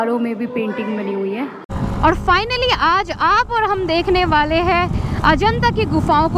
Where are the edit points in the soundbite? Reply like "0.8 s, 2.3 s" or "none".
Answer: 1.6 s